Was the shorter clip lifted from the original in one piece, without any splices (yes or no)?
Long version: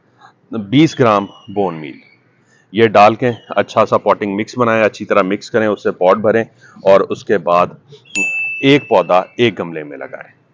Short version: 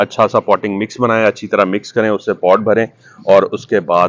yes